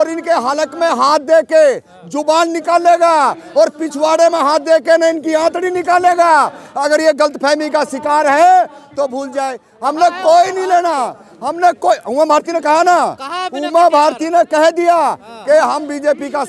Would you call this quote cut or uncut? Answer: uncut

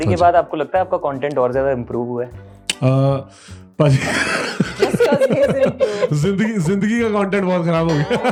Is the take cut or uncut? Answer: uncut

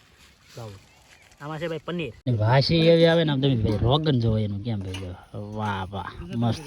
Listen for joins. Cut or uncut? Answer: cut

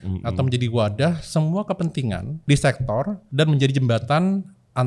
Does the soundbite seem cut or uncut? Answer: cut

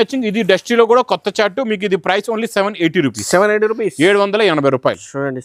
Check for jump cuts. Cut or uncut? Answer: uncut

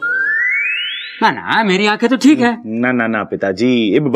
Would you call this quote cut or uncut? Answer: uncut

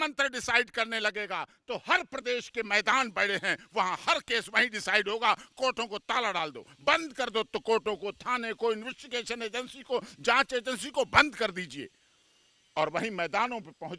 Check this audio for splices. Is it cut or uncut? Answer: uncut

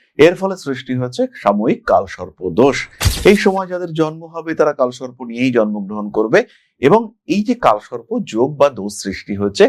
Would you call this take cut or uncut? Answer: uncut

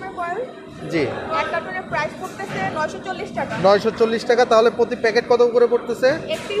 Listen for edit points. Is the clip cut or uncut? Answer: uncut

